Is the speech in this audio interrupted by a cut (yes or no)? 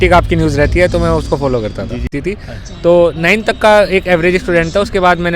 yes